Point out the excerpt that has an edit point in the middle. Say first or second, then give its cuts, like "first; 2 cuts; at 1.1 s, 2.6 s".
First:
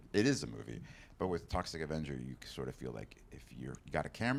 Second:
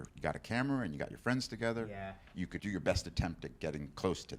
second; 1 cut; at 2.6 s